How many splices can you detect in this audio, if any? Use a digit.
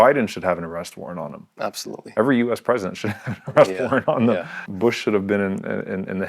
1